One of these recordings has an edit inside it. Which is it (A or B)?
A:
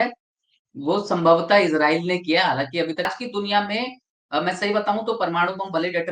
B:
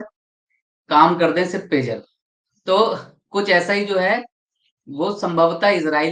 A